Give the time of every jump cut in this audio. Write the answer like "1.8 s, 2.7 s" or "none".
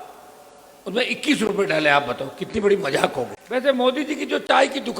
3.4 s